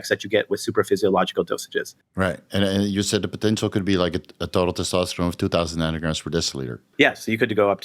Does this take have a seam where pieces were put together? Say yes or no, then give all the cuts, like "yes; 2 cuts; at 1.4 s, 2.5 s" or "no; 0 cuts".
yes; 2 cuts; at 2.0 s, 6.8 s